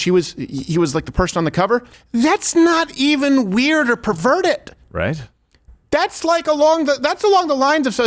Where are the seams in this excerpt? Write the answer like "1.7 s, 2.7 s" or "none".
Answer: 2.0 s